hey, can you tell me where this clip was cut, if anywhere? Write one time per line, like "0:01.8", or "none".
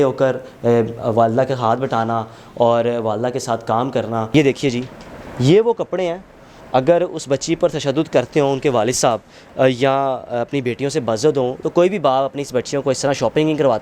0:04.3